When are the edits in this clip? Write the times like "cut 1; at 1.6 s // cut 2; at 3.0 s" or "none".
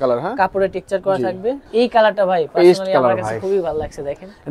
cut 1; at 1.6 s